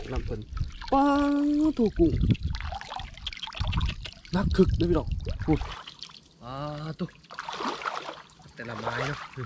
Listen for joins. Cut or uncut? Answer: cut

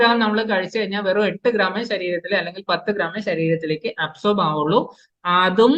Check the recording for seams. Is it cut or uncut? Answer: uncut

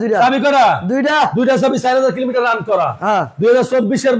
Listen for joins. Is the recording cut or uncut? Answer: uncut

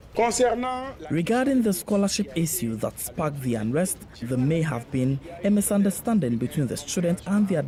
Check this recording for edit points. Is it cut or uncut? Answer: uncut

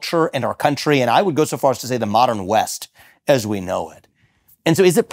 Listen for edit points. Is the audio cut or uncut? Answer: uncut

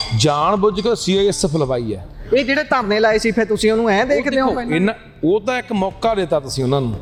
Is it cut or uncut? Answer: uncut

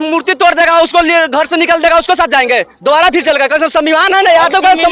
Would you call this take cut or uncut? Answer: uncut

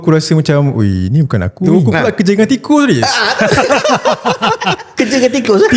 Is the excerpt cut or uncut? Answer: cut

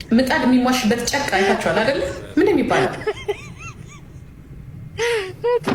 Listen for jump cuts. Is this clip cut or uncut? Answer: uncut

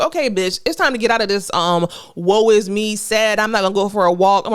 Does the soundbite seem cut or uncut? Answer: uncut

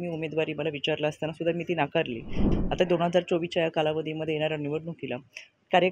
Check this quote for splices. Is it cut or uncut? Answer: cut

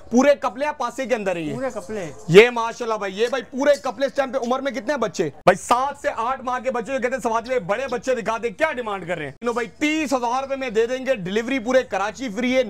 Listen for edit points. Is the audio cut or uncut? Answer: cut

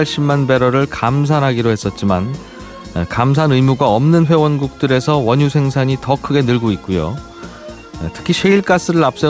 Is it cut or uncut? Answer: cut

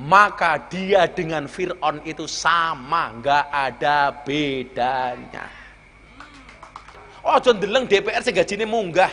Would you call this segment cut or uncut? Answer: cut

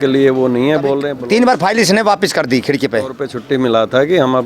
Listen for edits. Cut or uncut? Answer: cut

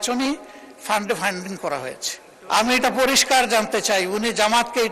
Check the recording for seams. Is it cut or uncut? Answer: cut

